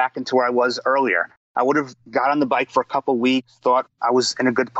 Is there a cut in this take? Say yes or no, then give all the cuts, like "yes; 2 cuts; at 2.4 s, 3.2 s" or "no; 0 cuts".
no; 0 cuts